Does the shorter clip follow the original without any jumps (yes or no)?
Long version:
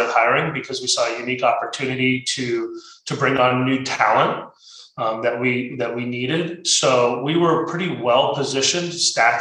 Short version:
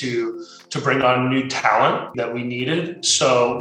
no